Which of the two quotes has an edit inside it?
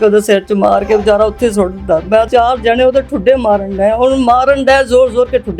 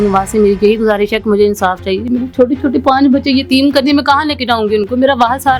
first; 1 cut; at 2.3 s

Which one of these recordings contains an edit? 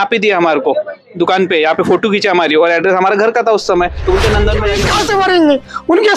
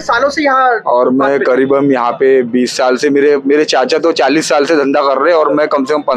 first; 1 cut; at 4.7 s

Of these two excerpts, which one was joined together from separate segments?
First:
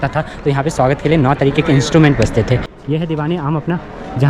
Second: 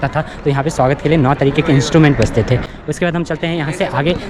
first; 1 cut; at 2.7 s

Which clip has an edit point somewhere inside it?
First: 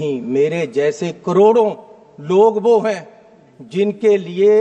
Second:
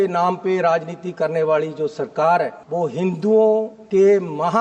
second; 2 cuts; at 2.6 s, 3.8 s

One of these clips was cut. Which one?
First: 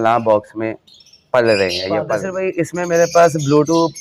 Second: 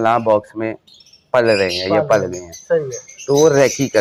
first; 1 cut; at 2.3 s

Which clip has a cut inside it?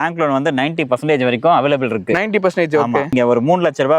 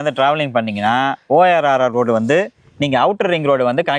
first; 1 cut; at 3.1 s

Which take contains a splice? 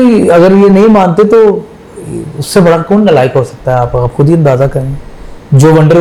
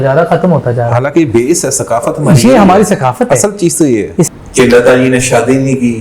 second; 1 cut; at 4.3 s

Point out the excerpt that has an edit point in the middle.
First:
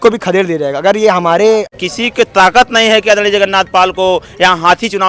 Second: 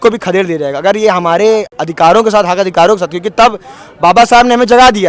first; 1 cut; at 1.8 s

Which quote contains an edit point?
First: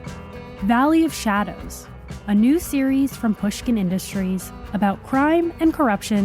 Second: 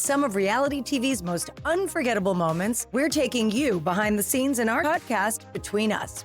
second; 2 cuts; at 2.8 s, 4.8 s

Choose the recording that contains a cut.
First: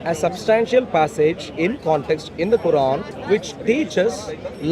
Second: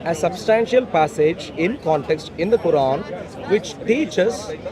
first; 1 cut; at 3.1 s

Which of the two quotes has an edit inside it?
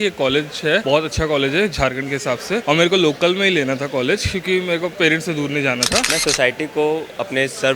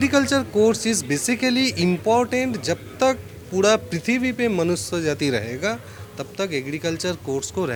first; 3 cuts; at 0.8 s, 2.6 s, 6.1 s

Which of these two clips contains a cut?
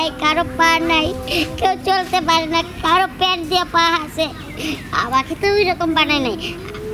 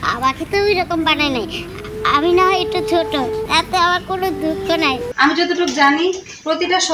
second; 2 cuts; at 3.5 s, 5.1 s

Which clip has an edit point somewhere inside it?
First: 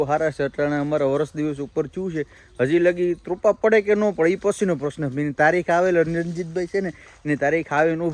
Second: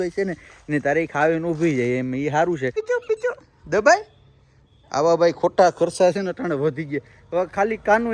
second; 1 cut; at 2.8 s

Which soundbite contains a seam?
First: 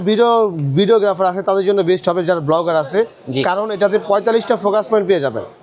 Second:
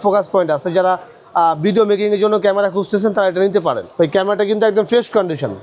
second; 1 cut; at 3.9 s

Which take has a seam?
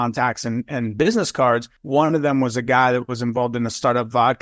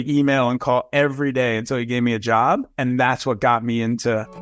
first; 1 cut; at 1.7 s

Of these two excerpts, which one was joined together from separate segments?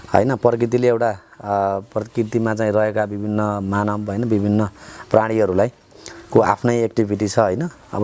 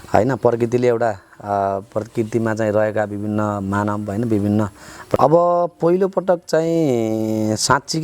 second; 1 cut; at 5.2 s

